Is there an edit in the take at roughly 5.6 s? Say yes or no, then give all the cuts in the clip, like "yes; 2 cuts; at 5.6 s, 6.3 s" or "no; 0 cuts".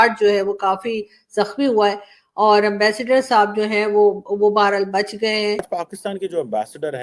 yes; 1 cut; at 5.6 s